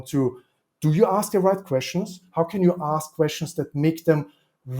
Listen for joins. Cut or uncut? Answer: cut